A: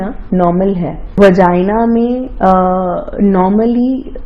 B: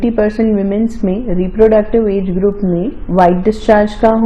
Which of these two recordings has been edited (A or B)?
A